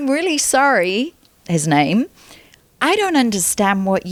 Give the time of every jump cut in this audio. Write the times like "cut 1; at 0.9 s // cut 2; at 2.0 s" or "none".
none